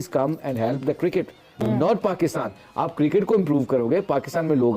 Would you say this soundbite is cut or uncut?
uncut